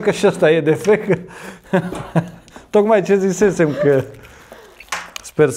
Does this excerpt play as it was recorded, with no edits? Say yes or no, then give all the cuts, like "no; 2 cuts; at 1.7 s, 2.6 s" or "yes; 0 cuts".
yes; 0 cuts